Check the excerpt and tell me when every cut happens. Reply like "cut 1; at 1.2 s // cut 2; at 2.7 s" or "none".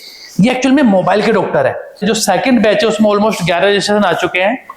cut 1; at 2.0 s